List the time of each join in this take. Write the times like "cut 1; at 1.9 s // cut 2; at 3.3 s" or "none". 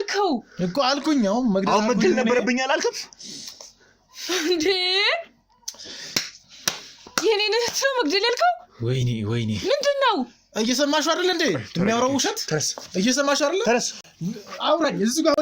none